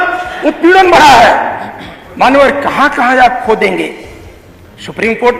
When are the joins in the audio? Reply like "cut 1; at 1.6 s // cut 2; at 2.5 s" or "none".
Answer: none